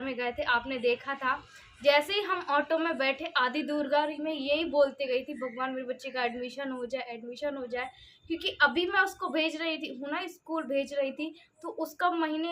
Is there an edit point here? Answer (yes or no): no